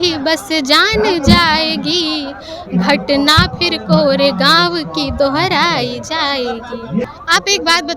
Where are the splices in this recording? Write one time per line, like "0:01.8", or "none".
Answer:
0:07.0